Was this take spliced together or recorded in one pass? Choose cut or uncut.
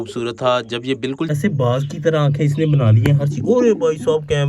cut